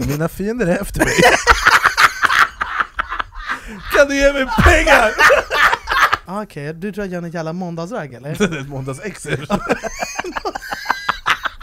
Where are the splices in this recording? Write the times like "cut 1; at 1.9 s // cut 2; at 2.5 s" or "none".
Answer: cut 1; at 6.2 s